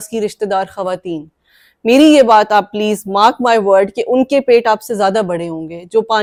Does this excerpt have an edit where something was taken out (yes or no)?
no